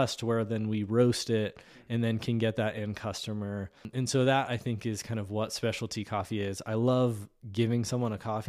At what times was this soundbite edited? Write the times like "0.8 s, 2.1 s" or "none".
3.8 s